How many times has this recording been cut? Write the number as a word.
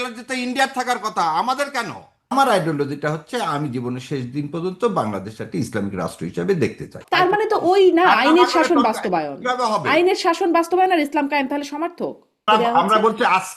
three